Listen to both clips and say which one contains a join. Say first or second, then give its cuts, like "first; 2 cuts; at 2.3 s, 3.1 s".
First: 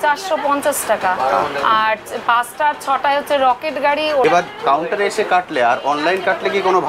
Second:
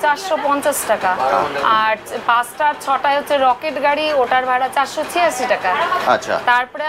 first; 1 cut; at 4.2 s